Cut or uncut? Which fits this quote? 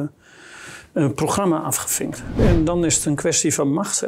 cut